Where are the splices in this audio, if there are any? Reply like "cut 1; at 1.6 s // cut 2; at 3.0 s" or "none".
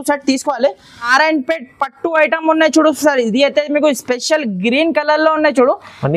cut 1; at 1.1 s